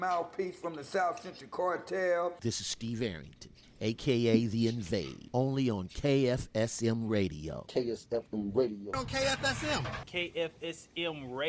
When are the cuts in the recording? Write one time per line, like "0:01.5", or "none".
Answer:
0:10.4